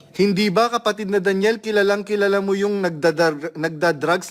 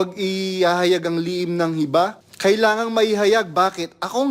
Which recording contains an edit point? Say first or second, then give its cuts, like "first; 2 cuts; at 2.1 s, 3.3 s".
second; 1 cut; at 2.2 s